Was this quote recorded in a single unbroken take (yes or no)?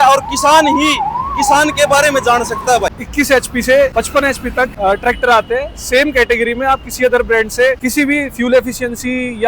no